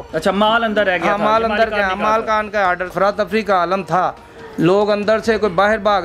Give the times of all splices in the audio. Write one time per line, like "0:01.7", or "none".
0:02.9